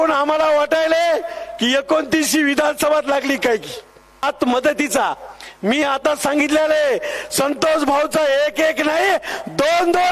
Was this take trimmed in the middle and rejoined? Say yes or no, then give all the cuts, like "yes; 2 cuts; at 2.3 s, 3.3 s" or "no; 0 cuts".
yes; 1 cut; at 4.2 s